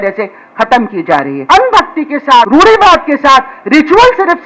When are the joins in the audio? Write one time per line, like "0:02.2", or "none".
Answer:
0:01.4
0:02.5